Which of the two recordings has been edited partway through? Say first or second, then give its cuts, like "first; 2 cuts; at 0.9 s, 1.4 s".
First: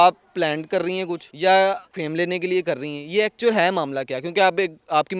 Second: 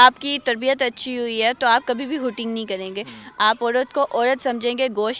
first; 2 cuts; at 1.2 s, 1.9 s